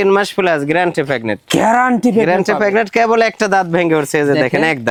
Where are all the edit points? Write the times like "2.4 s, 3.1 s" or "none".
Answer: none